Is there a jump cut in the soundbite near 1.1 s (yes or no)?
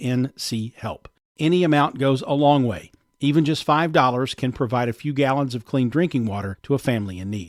no